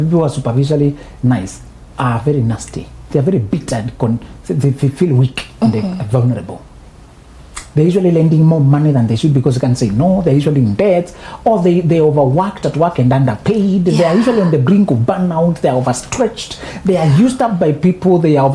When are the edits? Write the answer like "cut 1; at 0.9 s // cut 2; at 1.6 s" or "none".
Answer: none